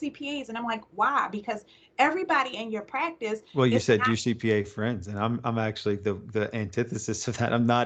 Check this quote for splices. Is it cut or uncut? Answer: uncut